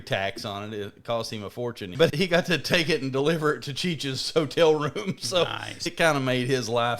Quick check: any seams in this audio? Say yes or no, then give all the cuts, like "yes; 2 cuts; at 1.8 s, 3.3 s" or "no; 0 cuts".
yes; 2 cuts; at 2.1 s, 5.8 s